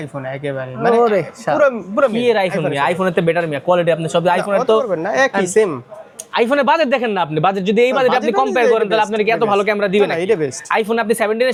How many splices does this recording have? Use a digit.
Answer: 0